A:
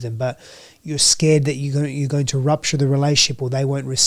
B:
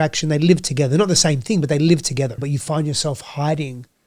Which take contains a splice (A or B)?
B